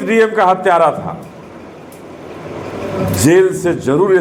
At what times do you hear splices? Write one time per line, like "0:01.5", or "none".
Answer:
none

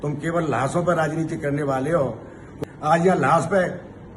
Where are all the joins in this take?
0:02.4

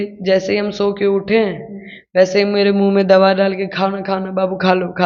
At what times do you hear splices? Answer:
none

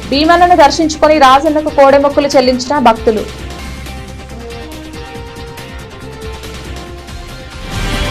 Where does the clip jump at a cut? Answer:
0:03.3

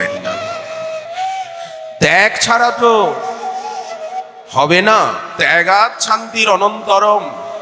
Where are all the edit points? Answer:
0:01.1

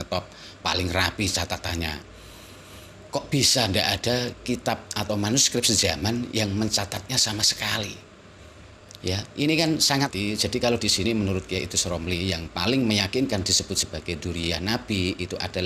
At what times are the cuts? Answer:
0:10.1

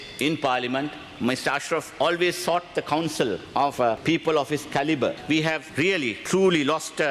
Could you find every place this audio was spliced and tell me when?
0:01.0
0:03.7
0:05.7

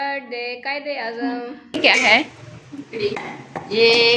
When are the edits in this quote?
0:01.8

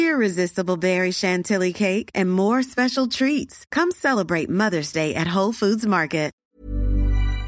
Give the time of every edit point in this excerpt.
0:06.3

